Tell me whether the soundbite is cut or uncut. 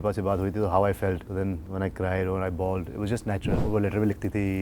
cut